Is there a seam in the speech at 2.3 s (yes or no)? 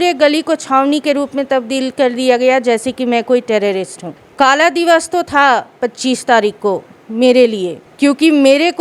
no